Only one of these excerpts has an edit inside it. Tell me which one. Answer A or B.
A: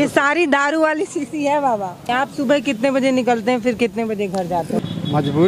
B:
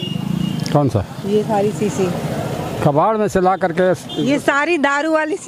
A